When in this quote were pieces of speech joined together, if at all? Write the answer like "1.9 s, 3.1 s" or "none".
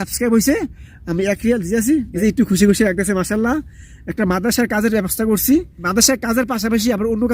2.1 s, 5.8 s